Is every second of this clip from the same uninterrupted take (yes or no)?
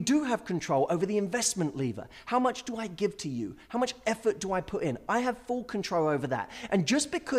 yes